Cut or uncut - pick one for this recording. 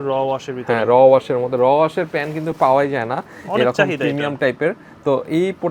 uncut